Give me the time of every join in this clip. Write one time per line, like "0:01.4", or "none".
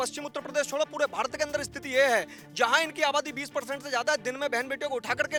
none